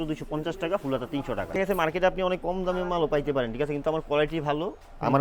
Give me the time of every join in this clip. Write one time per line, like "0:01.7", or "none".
0:01.6